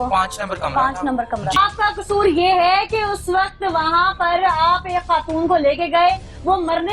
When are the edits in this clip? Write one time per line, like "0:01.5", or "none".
0:01.6

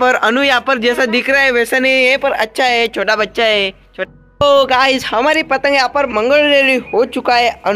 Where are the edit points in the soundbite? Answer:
0:03.9

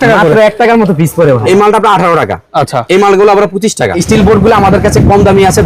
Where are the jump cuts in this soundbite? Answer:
0:01.4
0:04.0

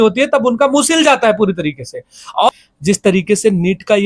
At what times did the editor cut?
0:02.5

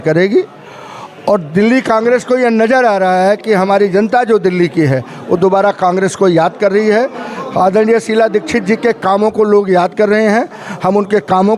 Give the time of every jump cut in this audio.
none

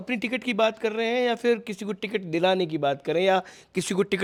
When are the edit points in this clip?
none

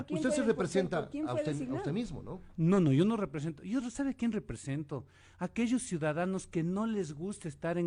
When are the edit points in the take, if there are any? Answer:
none

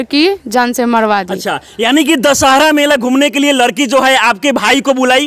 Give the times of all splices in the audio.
none

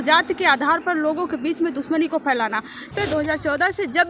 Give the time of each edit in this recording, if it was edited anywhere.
0:02.9

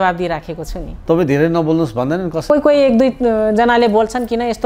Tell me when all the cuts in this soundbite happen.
0:01.0
0:02.4

